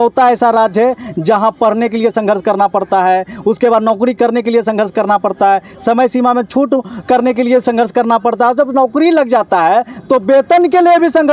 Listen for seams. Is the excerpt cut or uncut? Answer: uncut